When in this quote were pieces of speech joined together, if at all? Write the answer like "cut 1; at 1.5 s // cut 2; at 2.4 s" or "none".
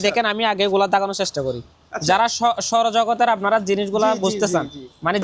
none